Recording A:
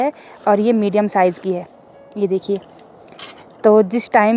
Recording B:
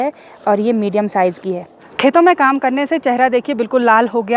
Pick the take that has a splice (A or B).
B